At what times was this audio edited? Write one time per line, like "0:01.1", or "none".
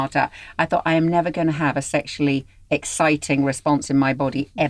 none